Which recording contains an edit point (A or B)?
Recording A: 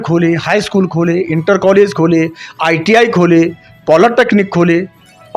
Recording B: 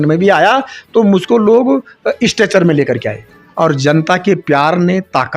B